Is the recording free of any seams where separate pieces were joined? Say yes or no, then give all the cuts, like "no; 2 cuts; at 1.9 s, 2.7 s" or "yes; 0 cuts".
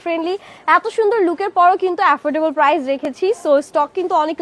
yes; 0 cuts